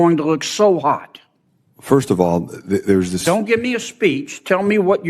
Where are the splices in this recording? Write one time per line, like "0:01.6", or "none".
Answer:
0:01.8